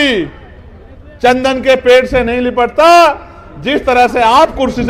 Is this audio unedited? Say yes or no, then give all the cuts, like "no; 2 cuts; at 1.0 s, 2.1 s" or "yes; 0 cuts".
yes; 0 cuts